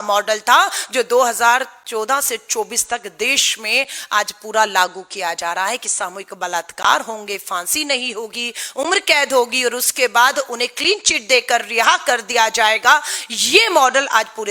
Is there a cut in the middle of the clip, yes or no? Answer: no